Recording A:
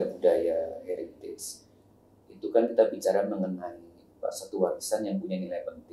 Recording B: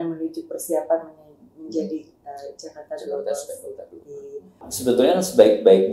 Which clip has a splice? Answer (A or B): B